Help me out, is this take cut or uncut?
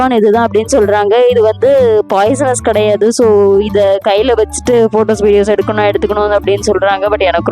uncut